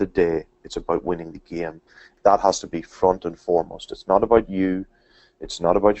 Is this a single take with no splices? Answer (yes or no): no